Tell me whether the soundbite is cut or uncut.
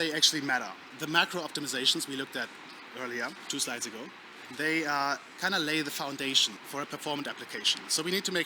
cut